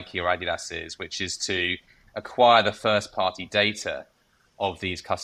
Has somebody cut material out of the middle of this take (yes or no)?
no